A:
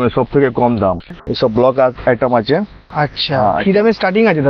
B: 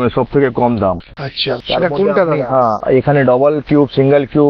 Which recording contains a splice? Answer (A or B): A